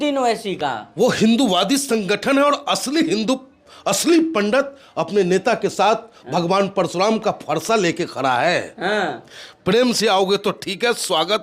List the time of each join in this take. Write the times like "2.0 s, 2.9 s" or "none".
none